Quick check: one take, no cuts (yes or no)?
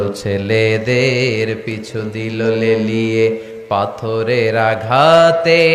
yes